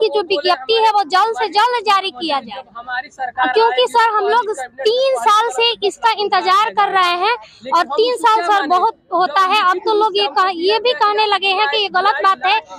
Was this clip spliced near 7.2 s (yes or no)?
no